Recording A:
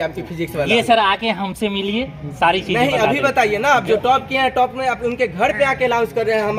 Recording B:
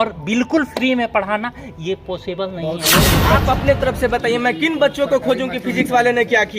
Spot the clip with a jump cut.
B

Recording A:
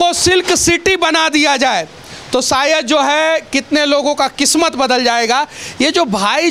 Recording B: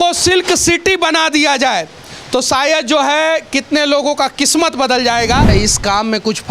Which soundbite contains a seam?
B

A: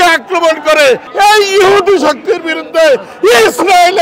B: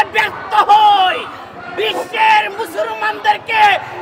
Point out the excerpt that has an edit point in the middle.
A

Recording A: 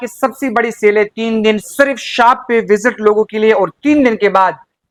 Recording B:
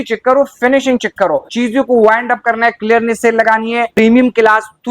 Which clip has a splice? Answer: B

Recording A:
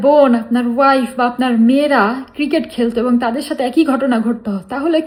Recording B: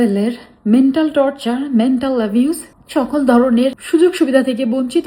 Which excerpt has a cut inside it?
B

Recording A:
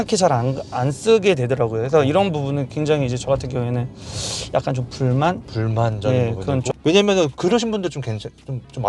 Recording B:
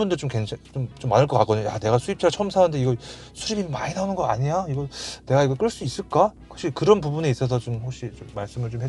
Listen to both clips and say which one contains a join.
A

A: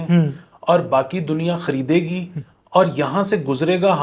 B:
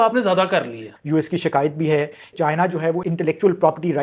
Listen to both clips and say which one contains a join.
B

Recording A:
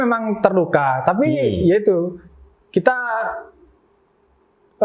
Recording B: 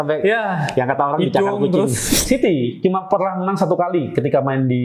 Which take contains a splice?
B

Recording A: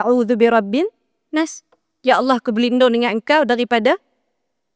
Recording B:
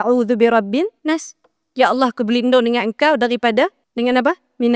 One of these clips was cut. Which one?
B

